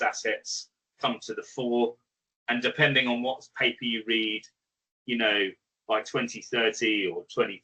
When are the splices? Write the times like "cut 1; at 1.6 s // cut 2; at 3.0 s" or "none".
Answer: none

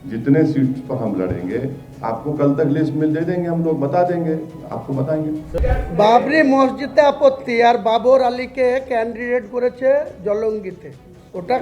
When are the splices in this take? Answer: cut 1; at 5.6 s

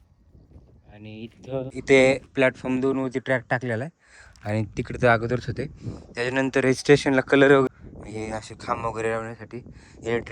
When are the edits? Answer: cut 1; at 1.8 s // cut 2; at 7.7 s

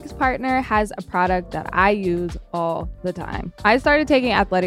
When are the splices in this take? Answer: cut 1; at 3.5 s

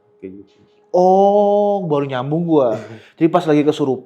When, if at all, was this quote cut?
none

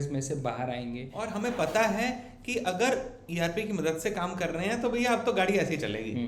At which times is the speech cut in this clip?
cut 1; at 1.2 s

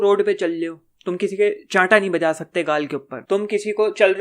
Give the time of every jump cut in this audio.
cut 1; at 3.1 s

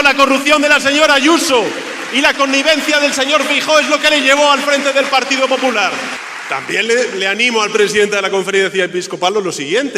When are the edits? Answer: cut 1; at 6.1 s

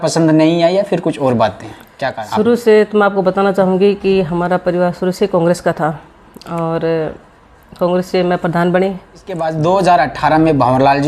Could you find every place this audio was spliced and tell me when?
cut 1; at 2.2 s // cut 2; at 9.4 s

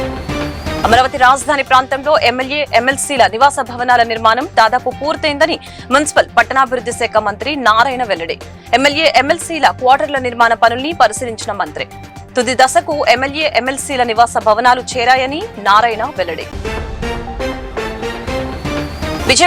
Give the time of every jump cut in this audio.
none

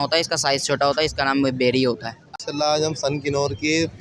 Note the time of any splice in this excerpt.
cut 1; at 2.4 s

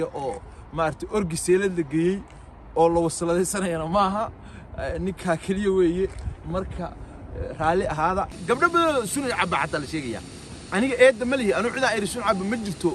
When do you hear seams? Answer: cut 1; at 8.4 s

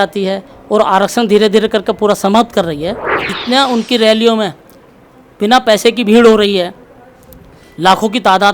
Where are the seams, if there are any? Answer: cut 1; at 3.3 s

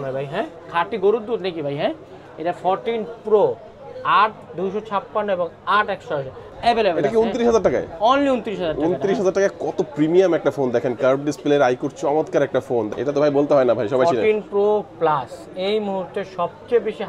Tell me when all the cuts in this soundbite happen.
cut 1; at 6.4 s // cut 2; at 12.9 s

